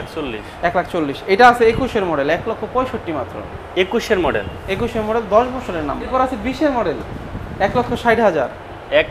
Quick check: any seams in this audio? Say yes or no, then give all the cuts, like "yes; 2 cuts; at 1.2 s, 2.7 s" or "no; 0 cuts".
yes; 1 cut; at 6.1 s